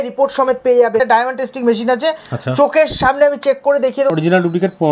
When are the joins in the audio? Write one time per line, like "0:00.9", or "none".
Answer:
0:01.0
0:04.1